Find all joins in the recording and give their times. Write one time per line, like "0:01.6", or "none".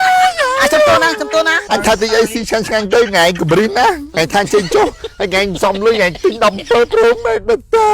0:01.6